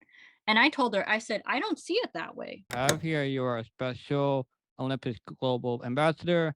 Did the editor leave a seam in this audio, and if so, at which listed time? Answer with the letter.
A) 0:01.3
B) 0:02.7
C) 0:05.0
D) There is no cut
B